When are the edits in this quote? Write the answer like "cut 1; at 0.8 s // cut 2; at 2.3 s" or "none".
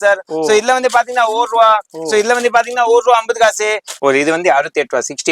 cut 1; at 3.9 s